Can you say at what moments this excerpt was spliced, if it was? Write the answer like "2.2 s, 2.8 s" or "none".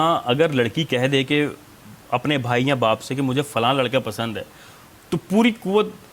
none